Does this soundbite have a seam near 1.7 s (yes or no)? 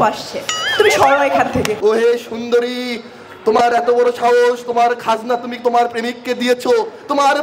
yes